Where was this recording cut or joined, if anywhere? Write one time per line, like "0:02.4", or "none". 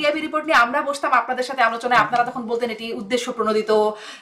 none